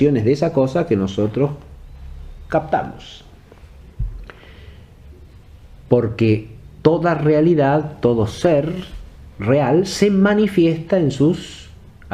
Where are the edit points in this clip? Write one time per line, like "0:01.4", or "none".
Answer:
0:10.1